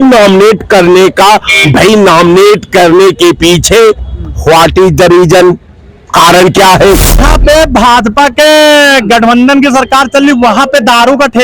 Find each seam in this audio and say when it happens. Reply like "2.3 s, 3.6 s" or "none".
7.3 s